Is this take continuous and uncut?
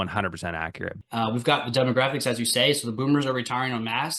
no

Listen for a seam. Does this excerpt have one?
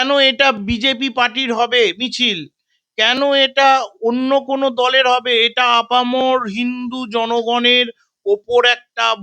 no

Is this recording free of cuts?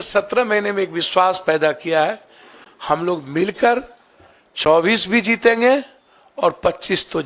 yes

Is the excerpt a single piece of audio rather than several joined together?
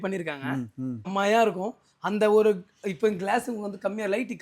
no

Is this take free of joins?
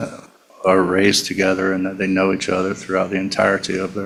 yes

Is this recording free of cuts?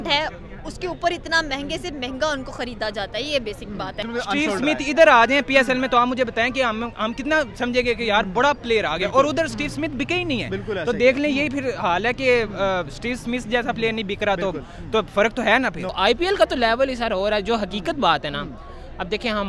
no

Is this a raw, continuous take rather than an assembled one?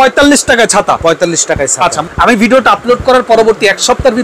no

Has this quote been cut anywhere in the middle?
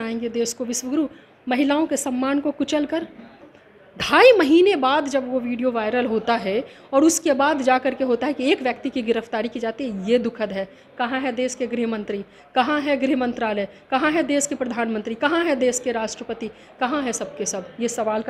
yes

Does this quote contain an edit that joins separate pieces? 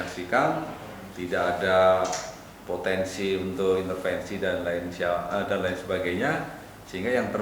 no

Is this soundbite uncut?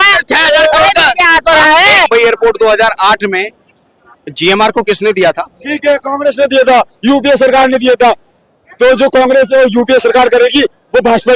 no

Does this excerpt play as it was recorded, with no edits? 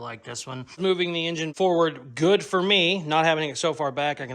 no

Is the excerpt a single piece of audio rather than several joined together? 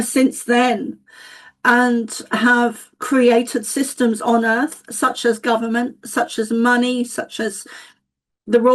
yes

